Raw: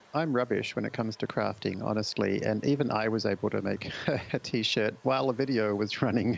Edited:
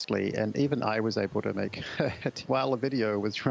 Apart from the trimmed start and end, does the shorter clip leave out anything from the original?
yes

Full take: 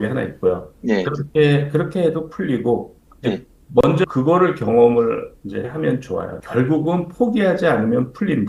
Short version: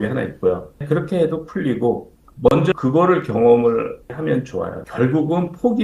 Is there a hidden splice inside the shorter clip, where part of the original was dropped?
yes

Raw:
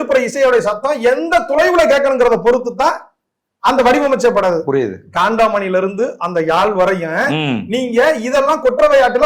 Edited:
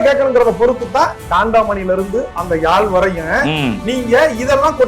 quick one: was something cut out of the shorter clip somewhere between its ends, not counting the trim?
yes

